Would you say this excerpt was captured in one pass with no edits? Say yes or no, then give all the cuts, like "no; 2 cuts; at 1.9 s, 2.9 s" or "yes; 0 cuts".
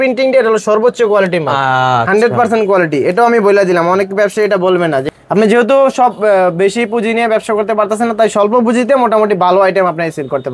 no; 1 cut; at 5.1 s